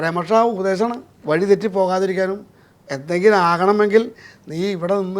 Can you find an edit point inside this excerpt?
yes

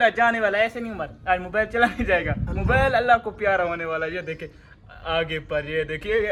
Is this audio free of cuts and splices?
yes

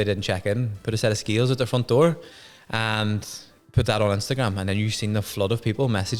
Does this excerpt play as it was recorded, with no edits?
no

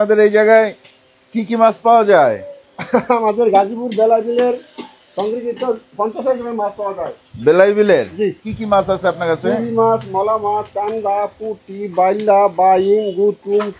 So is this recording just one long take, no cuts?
no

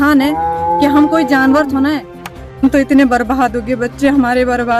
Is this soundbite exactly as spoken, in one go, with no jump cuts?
no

